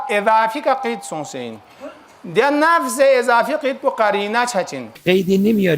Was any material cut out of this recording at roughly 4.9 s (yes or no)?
yes